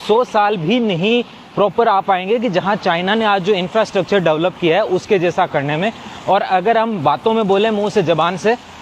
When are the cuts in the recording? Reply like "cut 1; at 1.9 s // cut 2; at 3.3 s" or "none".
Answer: none